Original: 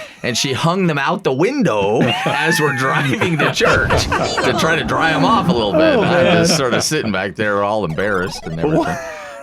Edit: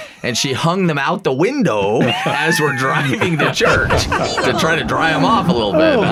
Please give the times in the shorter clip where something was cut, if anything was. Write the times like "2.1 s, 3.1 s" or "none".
none

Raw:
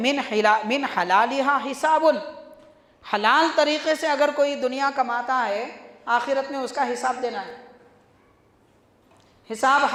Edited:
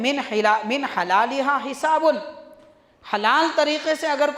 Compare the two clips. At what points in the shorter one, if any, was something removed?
none

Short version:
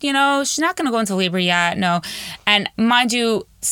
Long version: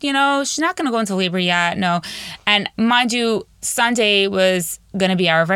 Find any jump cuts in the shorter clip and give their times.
none

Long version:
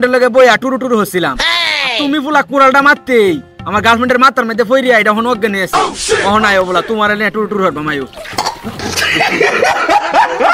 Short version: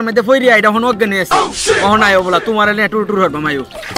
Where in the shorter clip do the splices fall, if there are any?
none

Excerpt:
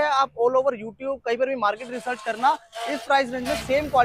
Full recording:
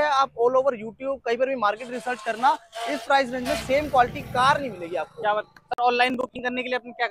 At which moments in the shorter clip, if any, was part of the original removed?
none

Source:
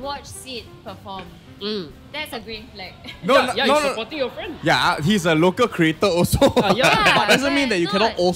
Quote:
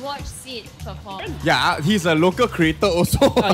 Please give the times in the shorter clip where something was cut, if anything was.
1.2 s

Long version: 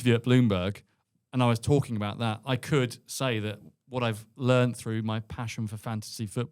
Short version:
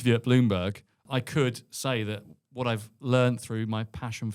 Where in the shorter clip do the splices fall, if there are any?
1.0 s

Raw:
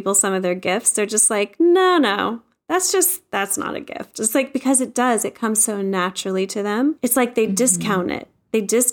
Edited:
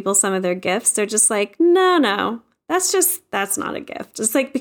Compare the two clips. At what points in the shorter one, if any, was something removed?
none

